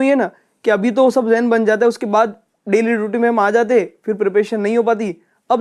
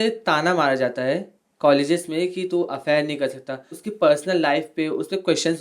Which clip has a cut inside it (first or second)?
second